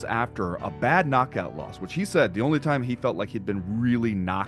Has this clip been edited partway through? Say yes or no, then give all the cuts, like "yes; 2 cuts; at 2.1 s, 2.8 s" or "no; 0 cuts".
no; 0 cuts